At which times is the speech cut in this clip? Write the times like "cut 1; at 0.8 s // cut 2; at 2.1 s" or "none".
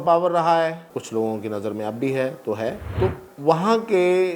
cut 1; at 0.9 s // cut 2; at 2.8 s